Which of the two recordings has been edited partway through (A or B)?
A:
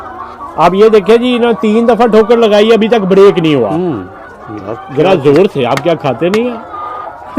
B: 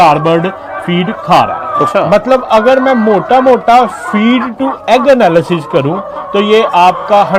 B